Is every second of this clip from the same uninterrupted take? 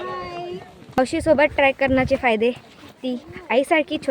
no; 1 cut; at 1.0 s

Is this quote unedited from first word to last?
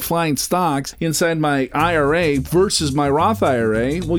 no; 1 cut; at 0.9 s

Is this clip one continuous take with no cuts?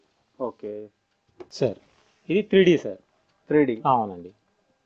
no; 1 cut; at 1.5 s

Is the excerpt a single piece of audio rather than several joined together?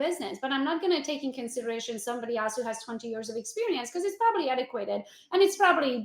yes; 0 cuts

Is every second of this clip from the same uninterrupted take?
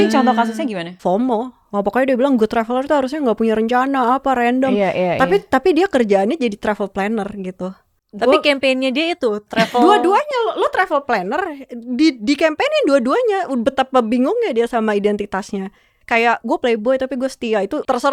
no; 1 cut; at 1.6 s

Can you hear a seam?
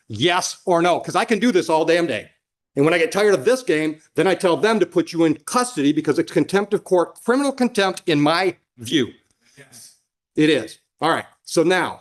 no; 0 cuts

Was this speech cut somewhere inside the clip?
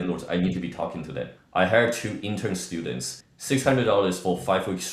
yes; 1 cut; at 1.4 s

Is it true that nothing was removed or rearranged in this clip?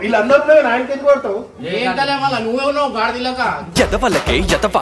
yes; 0 cuts

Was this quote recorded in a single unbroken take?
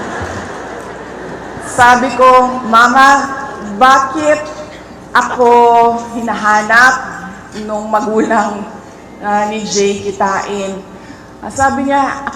no; 1 cut; at 0.9 s

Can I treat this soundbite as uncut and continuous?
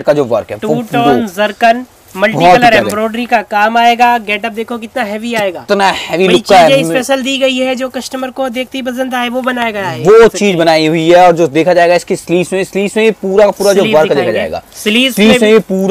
yes; 0 cuts

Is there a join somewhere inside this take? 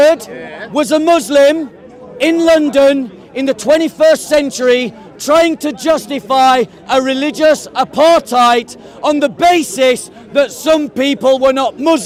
no; 0 cuts

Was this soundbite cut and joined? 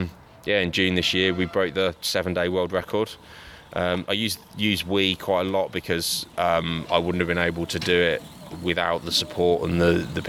no; 0 cuts

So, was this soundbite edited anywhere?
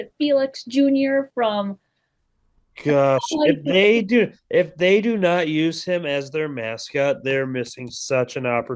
no; 0 cuts

